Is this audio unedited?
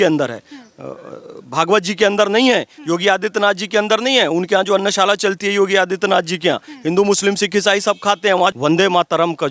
no; 1 cut; at 8.5 s

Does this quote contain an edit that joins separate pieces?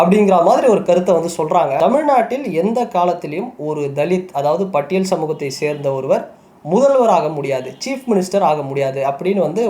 yes; 1 cut; at 1.8 s

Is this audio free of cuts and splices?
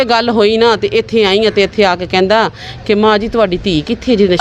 yes; 0 cuts

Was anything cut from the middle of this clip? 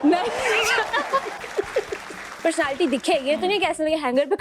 yes; 1 cut; at 2.3 s

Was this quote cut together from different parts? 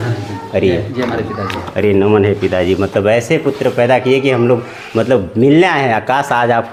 no; 0 cuts

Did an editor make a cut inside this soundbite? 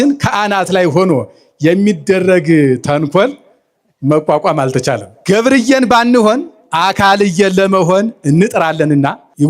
yes; 1 cut; at 5.1 s

